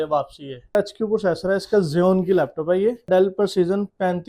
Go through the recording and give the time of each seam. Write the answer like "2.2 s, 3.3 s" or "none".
0.8 s, 3.1 s